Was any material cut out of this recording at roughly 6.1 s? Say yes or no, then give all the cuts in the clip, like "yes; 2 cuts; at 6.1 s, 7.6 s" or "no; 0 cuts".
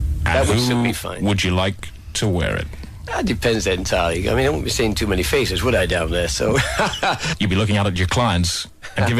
yes; 1 cut; at 6.1 s